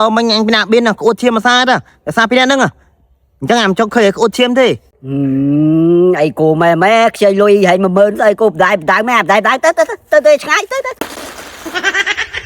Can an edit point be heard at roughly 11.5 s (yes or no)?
yes